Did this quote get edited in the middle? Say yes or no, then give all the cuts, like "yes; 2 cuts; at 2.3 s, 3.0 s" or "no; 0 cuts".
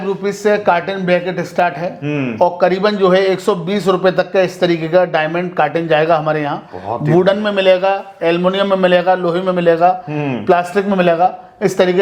no; 0 cuts